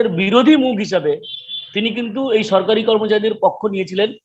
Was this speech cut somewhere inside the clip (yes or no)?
no